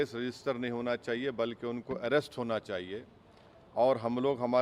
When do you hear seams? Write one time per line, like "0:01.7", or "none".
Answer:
none